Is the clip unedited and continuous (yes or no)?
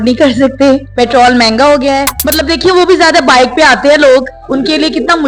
no